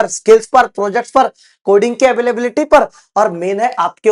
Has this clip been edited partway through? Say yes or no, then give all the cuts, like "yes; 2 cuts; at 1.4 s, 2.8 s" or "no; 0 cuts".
no; 0 cuts